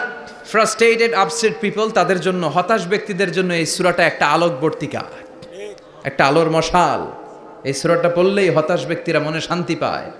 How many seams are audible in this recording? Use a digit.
0